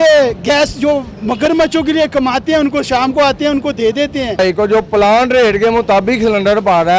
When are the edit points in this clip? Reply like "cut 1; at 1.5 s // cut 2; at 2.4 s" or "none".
cut 1; at 4.4 s